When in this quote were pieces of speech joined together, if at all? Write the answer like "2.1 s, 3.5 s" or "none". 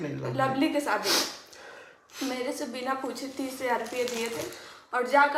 none